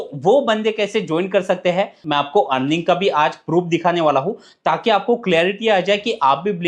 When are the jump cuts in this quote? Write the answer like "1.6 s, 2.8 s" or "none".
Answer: 2.0 s